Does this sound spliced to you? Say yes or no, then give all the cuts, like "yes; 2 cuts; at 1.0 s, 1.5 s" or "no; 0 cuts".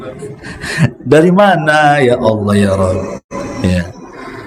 no; 0 cuts